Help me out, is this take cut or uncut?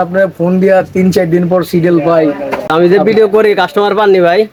uncut